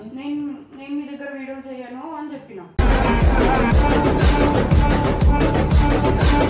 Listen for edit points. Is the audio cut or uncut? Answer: uncut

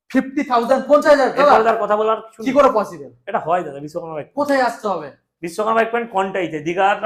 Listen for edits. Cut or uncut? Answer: uncut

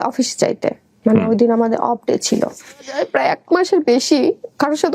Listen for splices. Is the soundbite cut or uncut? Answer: cut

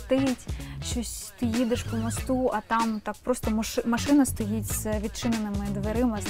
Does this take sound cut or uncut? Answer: uncut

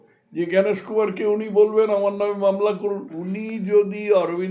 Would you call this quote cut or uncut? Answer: cut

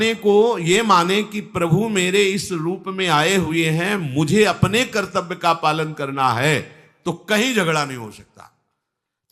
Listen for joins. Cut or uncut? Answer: uncut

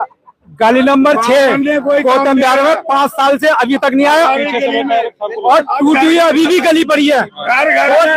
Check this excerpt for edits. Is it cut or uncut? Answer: uncut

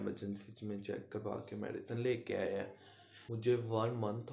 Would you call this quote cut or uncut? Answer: cut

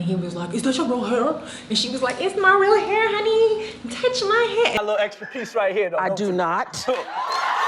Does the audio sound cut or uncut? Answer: cut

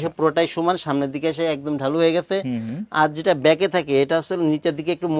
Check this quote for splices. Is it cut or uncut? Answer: uncut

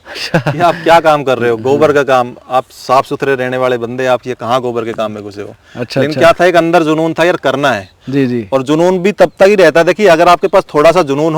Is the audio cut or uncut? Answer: uncut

